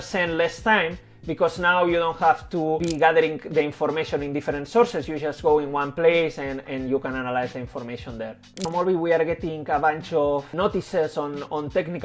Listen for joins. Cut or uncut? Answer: cut